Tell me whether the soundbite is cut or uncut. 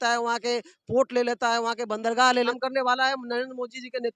cut